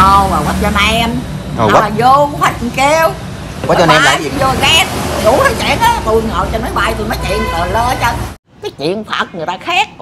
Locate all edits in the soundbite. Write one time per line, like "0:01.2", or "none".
0:08.4